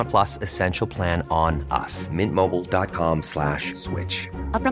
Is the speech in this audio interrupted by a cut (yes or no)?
no